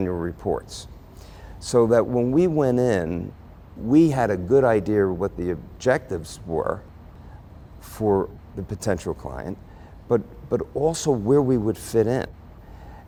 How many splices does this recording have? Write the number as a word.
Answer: zero